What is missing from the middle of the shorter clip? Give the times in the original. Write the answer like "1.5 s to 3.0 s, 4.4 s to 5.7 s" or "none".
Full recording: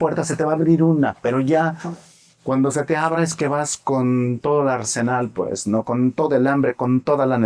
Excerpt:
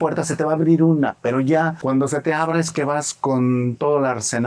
1.8 s to 2.4 s

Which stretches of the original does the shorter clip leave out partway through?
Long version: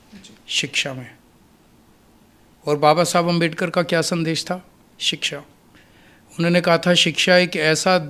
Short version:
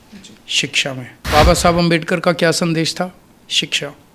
1.3 s to 2.8 s

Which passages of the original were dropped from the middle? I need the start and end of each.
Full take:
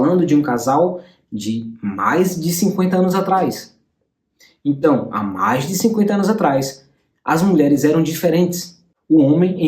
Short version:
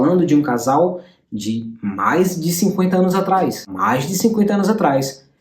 3.7 s to 5.3 s

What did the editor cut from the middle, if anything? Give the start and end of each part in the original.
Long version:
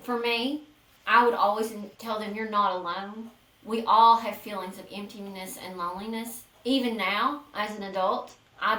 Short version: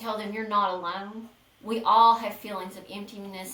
none

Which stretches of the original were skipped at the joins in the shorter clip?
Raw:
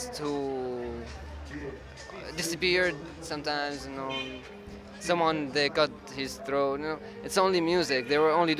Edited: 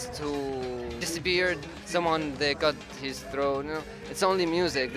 1.0 s to 2.4 s, 3.1 s to 4.9 s

